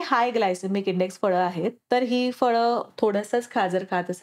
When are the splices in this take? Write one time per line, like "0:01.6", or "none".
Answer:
0:01.7
0:02.9